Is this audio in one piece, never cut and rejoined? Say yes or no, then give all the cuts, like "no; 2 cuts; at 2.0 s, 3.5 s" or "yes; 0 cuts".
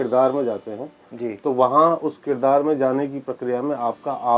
yes; 0 cuts